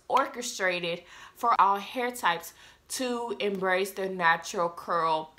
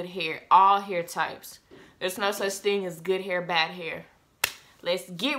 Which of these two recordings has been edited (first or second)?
first